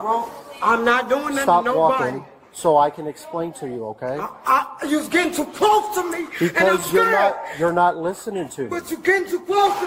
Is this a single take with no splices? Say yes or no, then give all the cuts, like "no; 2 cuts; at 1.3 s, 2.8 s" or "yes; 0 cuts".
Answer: yes; 0 cuts